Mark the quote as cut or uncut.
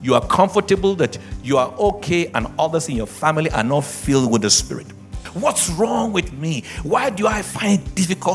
cut